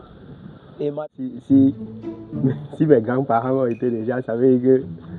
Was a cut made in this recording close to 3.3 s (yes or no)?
no